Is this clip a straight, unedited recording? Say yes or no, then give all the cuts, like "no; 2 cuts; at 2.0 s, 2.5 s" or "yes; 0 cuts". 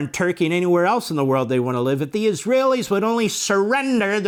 yes; 0 cuts